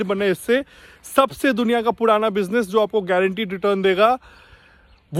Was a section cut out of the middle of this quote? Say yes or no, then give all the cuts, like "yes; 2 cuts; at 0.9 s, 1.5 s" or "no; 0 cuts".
no; 0 cuts